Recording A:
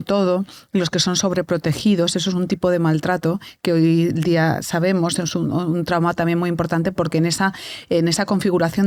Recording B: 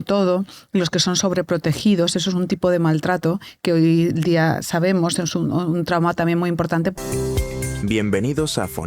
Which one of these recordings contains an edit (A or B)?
B